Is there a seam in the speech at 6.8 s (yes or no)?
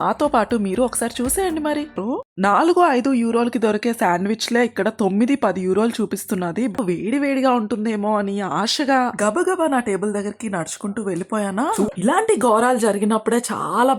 yes